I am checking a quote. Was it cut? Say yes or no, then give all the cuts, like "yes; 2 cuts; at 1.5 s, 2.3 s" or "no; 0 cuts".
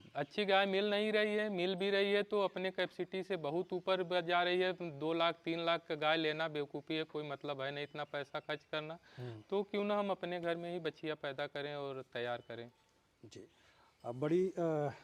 no; 0 cuts